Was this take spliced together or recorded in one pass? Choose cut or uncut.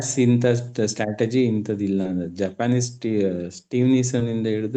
uncut